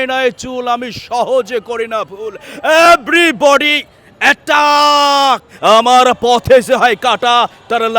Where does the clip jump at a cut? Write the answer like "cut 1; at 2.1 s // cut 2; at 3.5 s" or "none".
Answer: cut 1; at 5.5 s